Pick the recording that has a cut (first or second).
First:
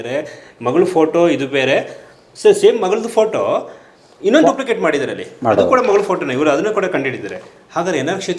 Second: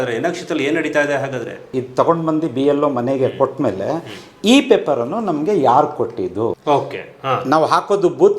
second